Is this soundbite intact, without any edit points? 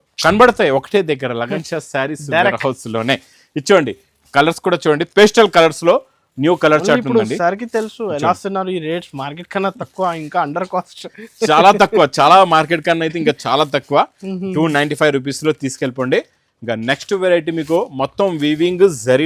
yes; 0 cuts

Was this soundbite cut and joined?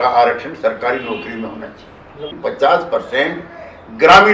yes; 1 cut; at 2.3 s

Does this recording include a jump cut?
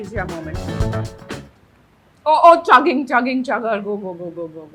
no; 0 cuts

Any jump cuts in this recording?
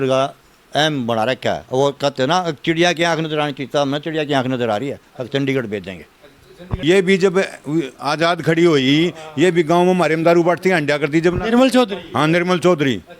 yes; 1 cut; at 6.5 s

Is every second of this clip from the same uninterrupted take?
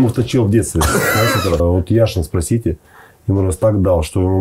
no; 1 cut; at 1.6 s

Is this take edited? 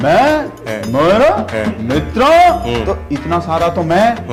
no; 0 cuts

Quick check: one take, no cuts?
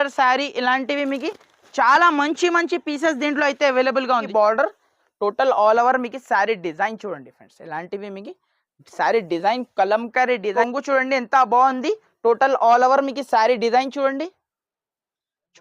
no; 2 cuts; at 4.3 s, 10.5 s

